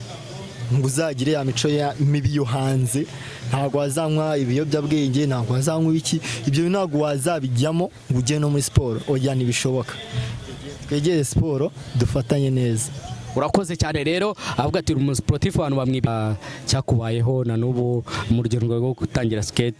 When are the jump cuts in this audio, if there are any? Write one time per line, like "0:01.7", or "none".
0:16.1